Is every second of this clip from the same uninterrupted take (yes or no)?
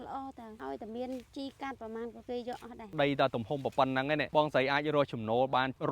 no